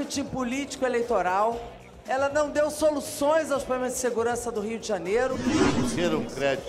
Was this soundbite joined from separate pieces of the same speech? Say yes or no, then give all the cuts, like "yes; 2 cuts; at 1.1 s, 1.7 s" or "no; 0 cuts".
yes; 1 cut; at 5.6 s